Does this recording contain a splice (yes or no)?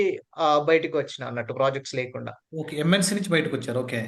no